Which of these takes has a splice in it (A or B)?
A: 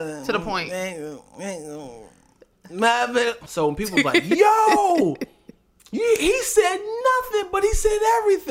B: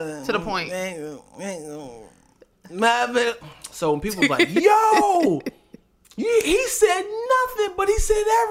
A